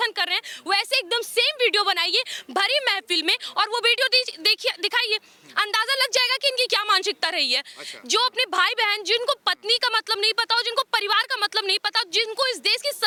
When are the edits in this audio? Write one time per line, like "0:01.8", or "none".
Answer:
none